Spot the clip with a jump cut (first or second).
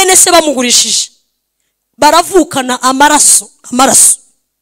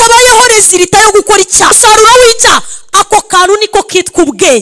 second